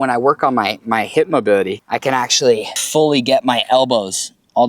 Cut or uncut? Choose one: cut